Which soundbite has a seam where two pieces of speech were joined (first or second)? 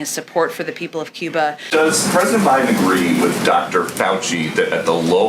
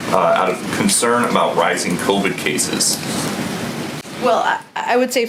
first